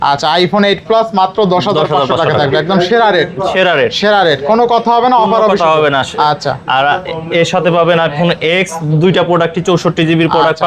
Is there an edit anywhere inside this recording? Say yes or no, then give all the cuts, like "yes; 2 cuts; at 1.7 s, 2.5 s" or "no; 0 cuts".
no; 0 cuts